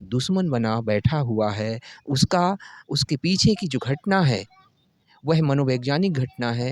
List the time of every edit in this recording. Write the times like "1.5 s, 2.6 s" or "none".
none